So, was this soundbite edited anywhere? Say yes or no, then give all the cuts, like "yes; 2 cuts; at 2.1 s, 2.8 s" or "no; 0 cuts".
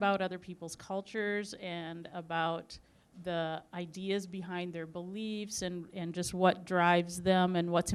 no; 0 cuts